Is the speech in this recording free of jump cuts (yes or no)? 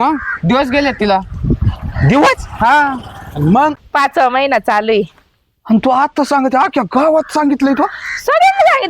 no